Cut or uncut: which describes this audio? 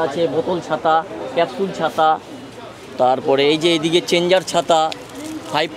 uncut